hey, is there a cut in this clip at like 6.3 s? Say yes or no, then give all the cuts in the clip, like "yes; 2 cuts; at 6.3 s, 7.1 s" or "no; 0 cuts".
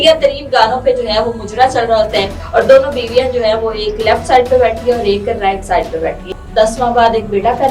yes; 2 cuts; at 2.4 s, 6.3 s